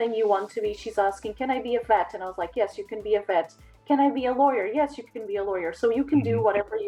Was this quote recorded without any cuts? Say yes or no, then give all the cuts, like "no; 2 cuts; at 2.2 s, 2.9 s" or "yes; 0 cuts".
yes; 0 cuts